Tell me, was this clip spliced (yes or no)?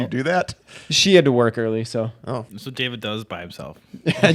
yes